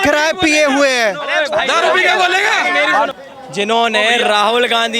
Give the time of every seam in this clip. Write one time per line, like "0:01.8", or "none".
0:03.2